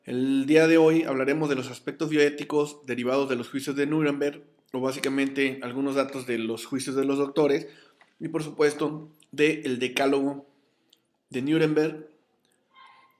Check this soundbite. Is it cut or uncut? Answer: cut